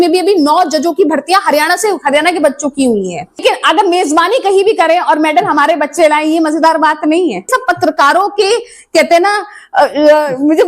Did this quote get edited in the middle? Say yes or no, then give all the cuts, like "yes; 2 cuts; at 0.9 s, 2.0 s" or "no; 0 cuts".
yes; 2 cuts; at 3.4 s, 7.5 s